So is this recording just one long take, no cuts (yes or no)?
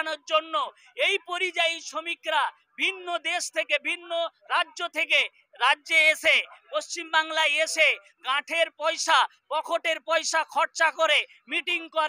yes